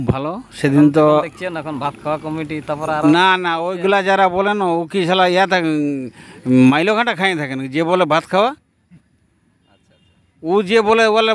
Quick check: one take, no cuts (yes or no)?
yes